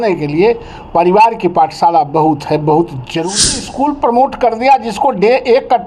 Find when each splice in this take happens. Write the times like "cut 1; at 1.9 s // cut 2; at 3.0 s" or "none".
cut 1; at 3.4 s